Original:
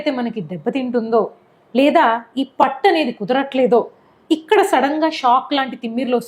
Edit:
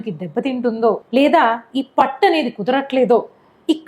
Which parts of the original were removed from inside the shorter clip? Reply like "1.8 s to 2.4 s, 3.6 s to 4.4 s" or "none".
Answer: 1.3 s to 1.7 s